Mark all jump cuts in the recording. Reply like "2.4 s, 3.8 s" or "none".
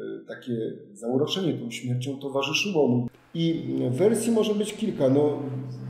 3.1 s

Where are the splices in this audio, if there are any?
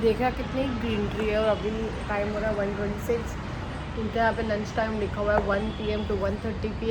none

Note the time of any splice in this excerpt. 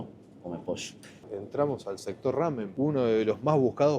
1.1 s, 2.7 s

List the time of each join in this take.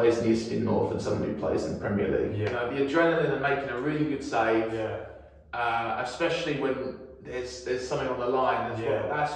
2.5 s

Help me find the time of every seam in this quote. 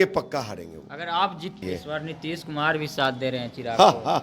1.6 s

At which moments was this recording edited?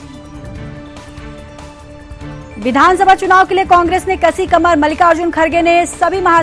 none

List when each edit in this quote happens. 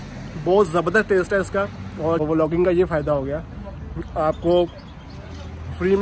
2.2 s

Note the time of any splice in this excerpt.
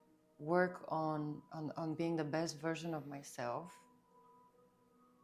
none

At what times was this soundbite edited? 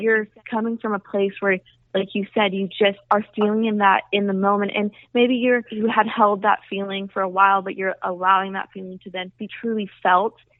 none

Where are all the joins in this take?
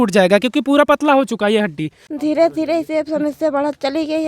2.1 s

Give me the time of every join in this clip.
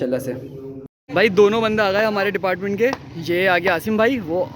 0.9 s

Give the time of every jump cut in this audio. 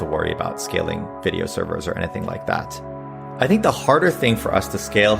3.2 s

